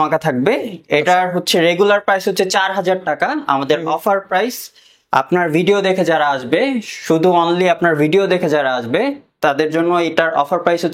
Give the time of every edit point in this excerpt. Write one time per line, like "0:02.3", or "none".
none